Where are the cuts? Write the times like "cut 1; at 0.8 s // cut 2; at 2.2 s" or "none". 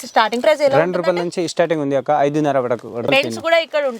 cut 1; at 3.1 s